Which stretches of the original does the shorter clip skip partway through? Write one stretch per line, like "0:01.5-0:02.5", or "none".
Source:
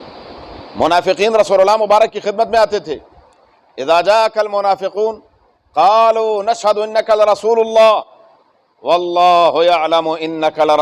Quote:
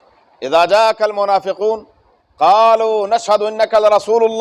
none